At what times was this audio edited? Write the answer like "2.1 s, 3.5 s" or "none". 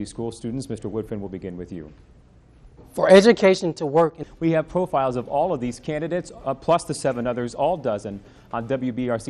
4.2 s